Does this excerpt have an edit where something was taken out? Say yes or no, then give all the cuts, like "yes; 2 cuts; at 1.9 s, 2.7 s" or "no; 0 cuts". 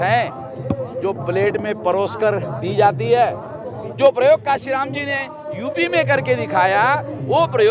yes; 1 cut; at 3.8 s